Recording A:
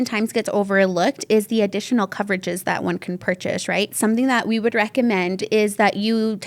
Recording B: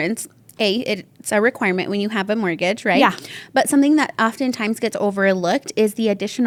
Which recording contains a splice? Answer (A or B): A